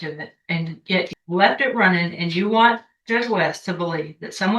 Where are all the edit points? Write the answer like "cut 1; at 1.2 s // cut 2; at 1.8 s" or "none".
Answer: cut 1; at 1.1 s